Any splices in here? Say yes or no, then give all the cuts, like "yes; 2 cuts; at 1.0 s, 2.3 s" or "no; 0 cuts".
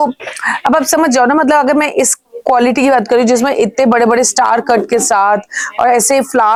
no; 0 cuts